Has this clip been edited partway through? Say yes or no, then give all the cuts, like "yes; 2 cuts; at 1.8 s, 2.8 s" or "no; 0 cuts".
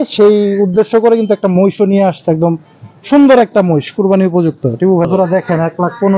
yes; 1 cut; at 5.1 s